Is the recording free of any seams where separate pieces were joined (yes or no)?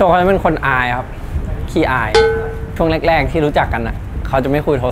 yes